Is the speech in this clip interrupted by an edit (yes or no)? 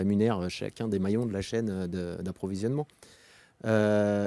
no